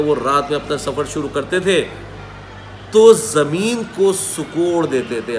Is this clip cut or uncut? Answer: uncut